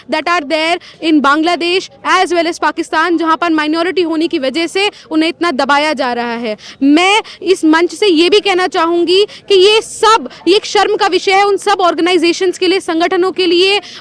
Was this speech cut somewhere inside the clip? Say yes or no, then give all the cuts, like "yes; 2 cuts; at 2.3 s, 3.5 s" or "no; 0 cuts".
no; 0 cuts